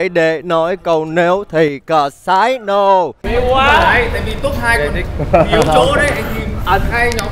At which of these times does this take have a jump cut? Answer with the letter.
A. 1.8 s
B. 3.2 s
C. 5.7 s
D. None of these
B